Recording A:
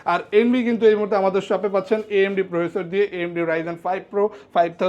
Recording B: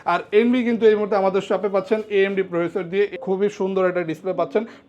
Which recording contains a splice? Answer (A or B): B